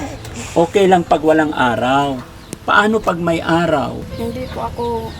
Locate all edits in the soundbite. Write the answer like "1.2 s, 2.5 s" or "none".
4.1 s